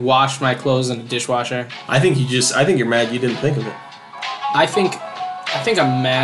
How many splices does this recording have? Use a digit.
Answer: 0